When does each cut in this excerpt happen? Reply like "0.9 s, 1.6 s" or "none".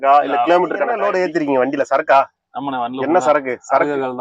1.0 s